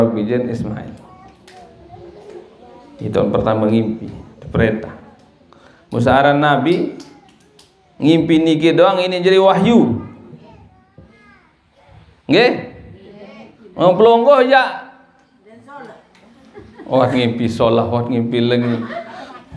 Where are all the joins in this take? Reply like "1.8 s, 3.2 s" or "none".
none